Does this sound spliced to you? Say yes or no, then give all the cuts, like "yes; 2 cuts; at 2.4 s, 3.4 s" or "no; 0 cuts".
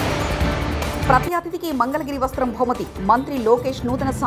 no; 0 cuts